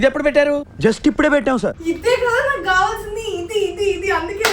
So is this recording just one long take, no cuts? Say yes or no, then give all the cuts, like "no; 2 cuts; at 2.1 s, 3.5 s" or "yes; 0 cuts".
no; 1 cut; at 1.8 s